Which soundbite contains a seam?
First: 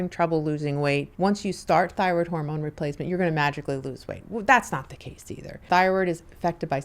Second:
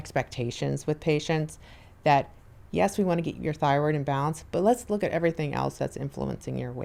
first; 2 cuts; at 1.1 s, 5.6 s

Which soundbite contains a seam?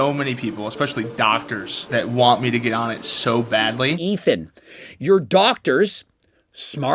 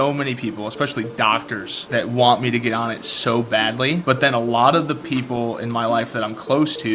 first; 1 cut; at 4.0 s

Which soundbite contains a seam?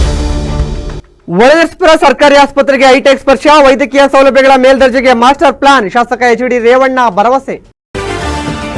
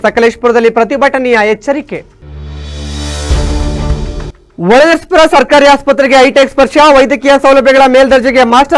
first; 1 cut; at 7.6 s

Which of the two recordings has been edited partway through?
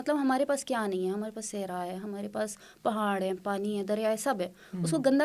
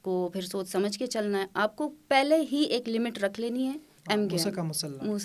second; 1 cut; at 3.9 s

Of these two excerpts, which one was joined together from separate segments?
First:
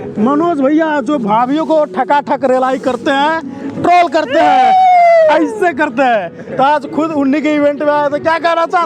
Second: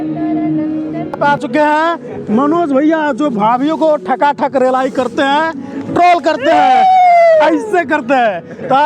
second; 1 cut; at 1.2 s

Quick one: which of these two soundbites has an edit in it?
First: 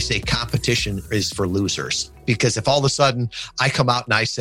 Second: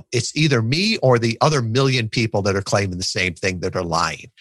first; 2 cuts; at 1.0 s, 2.2 s

